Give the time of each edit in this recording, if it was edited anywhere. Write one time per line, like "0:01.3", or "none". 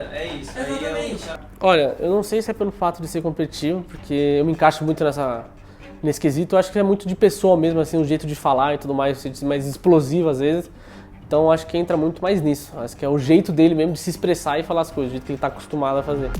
0:01.3